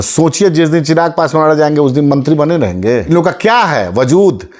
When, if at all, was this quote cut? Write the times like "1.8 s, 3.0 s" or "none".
3.1 s